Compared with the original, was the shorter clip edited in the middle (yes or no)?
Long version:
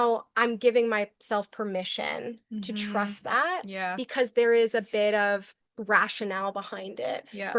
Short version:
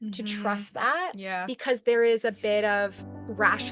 no